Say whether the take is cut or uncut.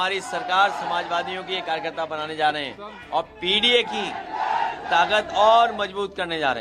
uncut